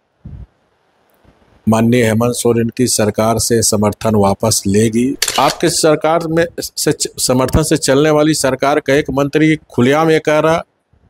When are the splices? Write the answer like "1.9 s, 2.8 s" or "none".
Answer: 5.2 s